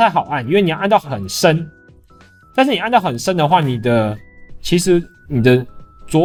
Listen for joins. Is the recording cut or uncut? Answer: uncut